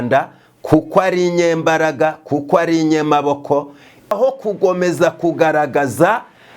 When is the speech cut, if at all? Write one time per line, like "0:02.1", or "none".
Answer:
0:04.1